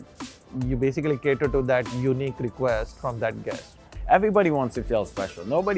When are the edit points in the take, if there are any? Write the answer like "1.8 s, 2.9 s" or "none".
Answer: 3.9 s